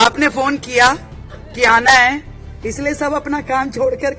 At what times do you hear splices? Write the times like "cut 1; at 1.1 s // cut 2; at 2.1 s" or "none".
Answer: none